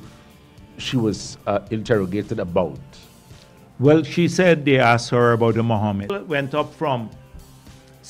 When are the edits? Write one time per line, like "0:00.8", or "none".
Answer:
0:06.1